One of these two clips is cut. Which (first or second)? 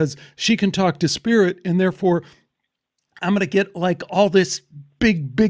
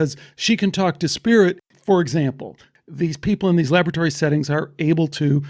second